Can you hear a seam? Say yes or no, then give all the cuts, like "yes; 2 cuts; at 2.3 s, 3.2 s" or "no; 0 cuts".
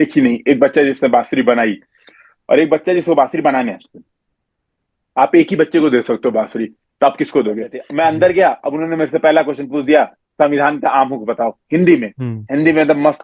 yes; 1 cut; at 7.8 s